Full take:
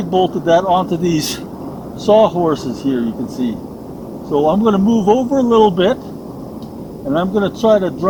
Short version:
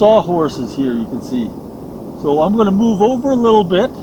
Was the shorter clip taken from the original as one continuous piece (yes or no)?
yes